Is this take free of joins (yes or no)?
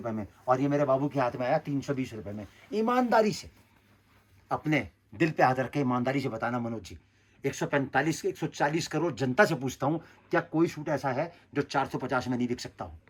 yes